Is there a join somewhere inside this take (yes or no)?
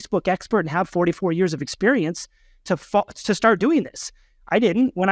no